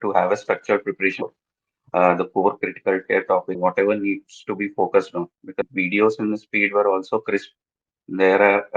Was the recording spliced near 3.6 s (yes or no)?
yes